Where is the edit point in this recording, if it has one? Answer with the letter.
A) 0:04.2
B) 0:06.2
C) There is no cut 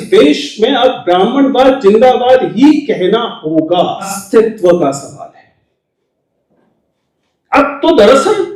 A